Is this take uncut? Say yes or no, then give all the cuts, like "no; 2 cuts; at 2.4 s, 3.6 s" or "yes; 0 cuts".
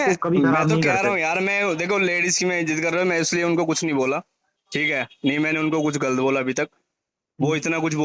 no; 1 cut; at 1.3 s